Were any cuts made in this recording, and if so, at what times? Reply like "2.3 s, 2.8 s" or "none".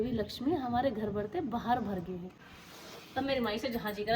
2.3 s